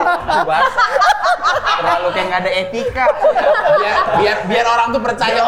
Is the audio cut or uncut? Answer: uncut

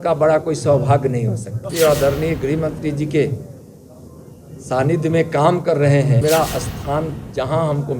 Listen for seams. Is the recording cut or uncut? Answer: cut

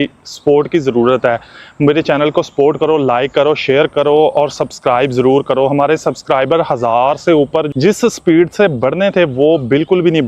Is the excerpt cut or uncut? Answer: uncut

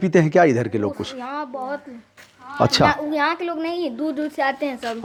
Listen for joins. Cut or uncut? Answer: uncut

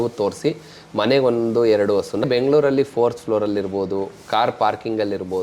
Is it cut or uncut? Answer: cut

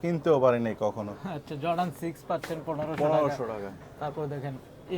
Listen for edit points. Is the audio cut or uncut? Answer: uncut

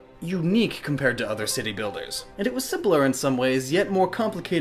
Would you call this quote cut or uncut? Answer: uncut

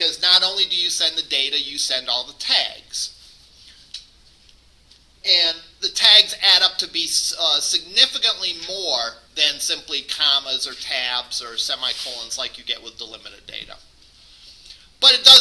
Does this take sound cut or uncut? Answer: uncut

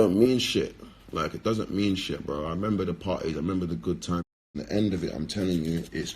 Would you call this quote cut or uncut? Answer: cut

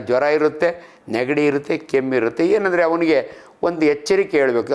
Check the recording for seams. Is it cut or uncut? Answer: uncut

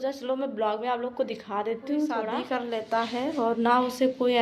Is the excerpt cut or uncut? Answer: cut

